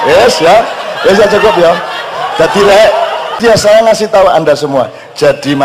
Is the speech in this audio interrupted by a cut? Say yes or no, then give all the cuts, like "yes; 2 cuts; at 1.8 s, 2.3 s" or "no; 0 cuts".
yes; 1 cut; at 3.4 s